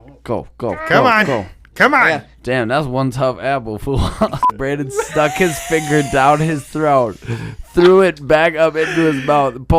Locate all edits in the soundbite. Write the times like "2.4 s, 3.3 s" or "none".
4.4 s